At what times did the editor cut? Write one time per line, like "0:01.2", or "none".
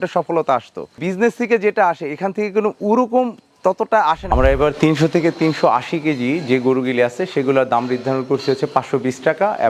0:04.3